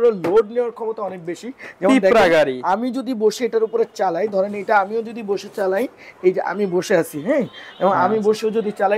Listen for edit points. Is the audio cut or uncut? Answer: uncut